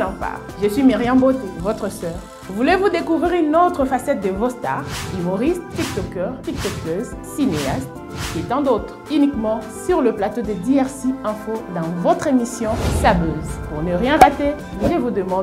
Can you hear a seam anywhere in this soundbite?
no; 0 cuts

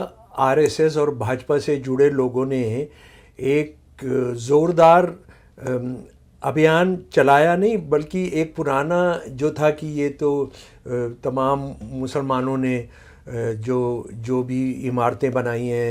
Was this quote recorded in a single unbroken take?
yes; 0 cuts

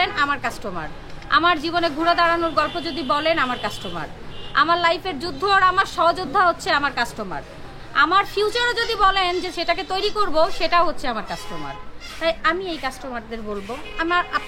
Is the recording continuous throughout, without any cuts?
yes; 0 cuts

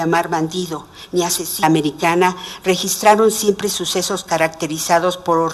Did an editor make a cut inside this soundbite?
no; 0 cuts

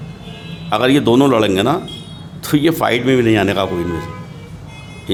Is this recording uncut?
yes; 0 cuts

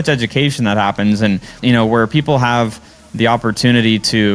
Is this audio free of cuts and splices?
no; 1 cut; at 1.6 s

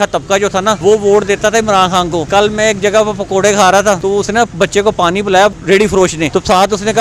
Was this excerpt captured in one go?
no; 4 cuts; at 0.8 s, 2.2 s, 4.0 s, 5.8 s

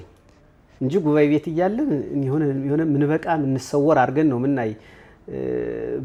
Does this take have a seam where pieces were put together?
no; 0 cuts

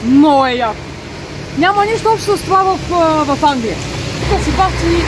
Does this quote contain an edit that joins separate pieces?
no; 0 cuts

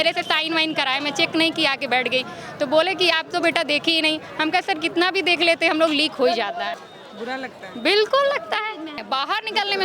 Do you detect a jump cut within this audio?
yes; 2 cuts; at 6.8 s, 9.0 s

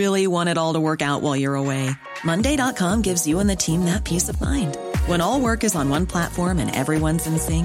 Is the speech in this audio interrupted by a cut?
no; 0 cuts

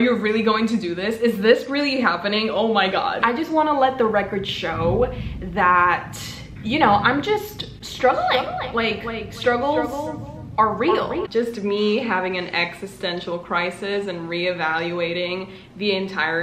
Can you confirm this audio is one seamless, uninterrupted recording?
no; 2 cuts; at 3.2 s, 11.2 s

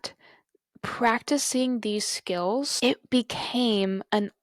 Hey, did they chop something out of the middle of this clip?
no; 0 cuts

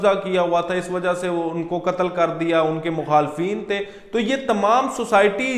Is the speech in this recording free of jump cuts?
yes; 0 cuts

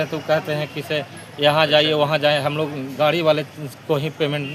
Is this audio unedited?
yes; 0 cuts

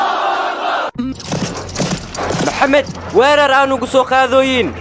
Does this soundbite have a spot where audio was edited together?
yes; 1 cut; at 1.1 s

